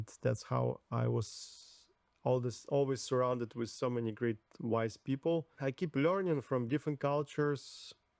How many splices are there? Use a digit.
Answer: 1